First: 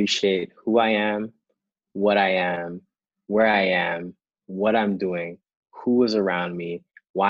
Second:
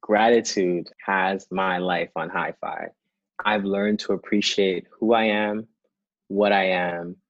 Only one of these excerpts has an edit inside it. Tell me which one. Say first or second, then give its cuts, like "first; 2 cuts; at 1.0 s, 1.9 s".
second; 1 cut; at 0.9 s